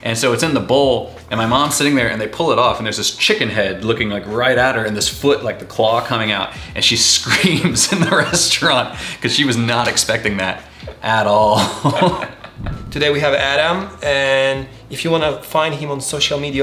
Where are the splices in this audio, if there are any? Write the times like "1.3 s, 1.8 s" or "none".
none

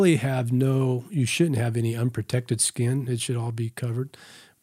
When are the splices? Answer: none

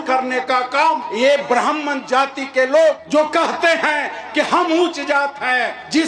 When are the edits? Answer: 1.1 s, 3.0 s

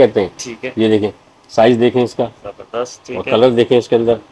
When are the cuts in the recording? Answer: none

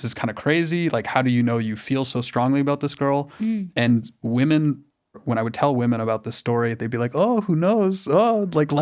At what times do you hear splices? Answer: 5.2 s

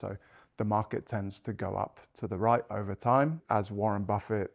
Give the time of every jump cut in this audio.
3.4 s

